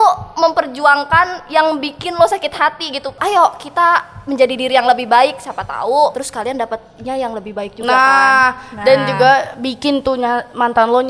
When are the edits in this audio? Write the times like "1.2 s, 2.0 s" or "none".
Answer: 3.2 s, 6.2 s